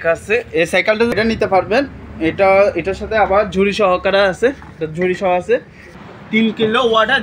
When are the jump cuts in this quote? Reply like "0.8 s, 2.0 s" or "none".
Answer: 1.2 s, 6.0 s